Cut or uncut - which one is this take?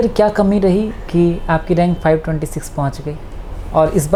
uncut